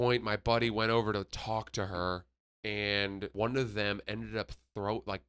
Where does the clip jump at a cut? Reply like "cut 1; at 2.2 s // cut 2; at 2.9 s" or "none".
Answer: cut 1; at 3.3 s